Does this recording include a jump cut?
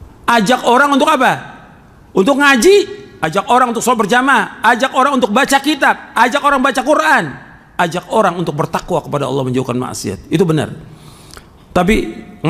no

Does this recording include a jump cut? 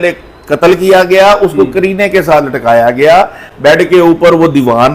no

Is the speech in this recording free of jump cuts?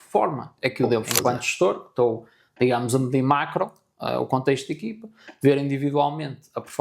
no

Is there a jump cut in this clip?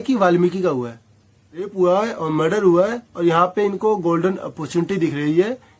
yes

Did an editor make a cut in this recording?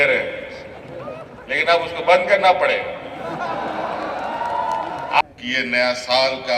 yes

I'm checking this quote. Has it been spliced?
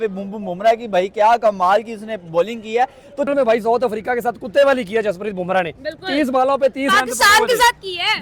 yes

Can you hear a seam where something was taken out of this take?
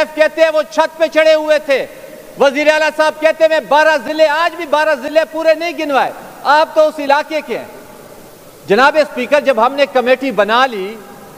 no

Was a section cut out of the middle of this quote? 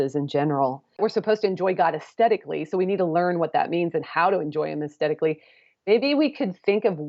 yes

